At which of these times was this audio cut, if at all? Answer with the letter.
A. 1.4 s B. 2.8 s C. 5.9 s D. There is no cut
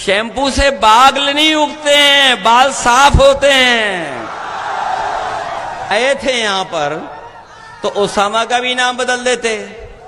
C